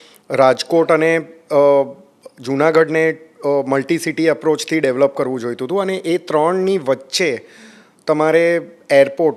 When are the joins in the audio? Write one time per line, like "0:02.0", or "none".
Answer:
none

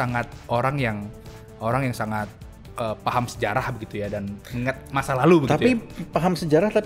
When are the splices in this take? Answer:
none

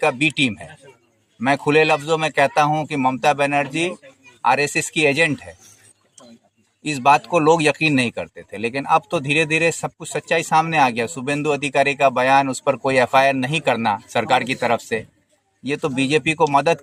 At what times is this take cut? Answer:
none

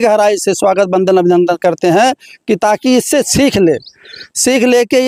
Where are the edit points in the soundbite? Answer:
none

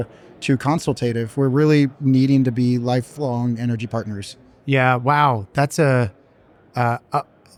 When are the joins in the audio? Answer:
none

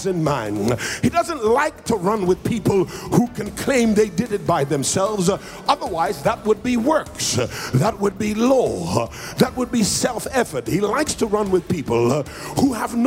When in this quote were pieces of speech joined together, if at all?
none

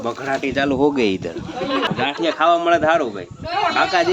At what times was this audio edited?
0:01.9

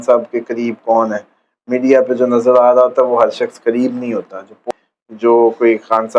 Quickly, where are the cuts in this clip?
0:04.6

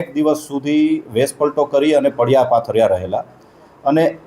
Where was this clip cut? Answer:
none

